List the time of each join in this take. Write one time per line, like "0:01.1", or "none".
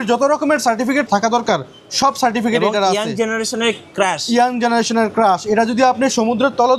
0:01.1